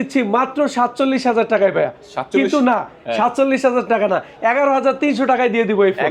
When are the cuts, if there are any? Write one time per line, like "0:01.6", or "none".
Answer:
none